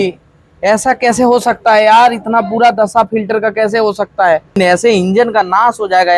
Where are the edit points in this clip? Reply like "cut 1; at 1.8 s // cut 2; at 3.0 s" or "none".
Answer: cut 1; at 4.6 s